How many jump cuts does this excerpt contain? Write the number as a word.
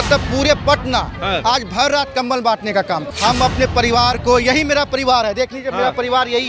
one